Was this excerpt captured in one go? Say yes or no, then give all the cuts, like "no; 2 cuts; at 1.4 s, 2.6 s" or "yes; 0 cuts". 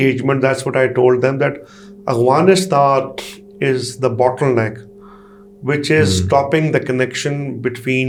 yes; 0 cuts